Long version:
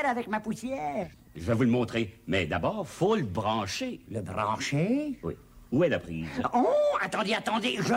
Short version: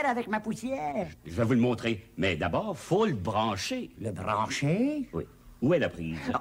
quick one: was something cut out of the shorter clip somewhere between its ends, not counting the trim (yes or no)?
yes